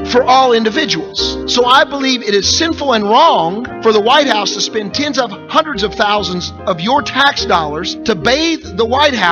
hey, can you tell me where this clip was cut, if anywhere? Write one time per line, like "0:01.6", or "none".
none